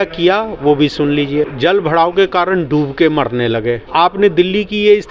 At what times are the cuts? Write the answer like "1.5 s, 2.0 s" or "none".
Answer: 1.5 s